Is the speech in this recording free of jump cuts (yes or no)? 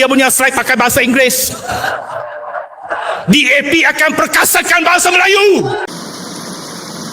no